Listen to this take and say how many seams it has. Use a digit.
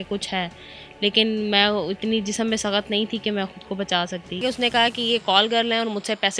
1